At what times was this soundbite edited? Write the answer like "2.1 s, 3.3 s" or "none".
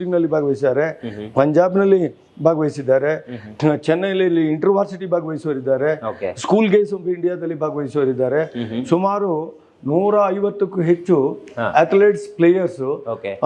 none